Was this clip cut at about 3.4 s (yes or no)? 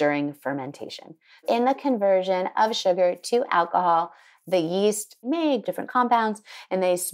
no